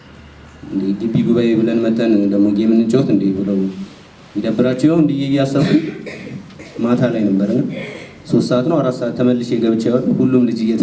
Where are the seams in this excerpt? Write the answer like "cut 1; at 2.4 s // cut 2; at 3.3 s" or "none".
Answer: none